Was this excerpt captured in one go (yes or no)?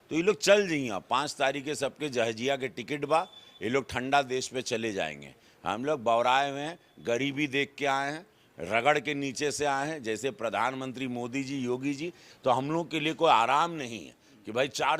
no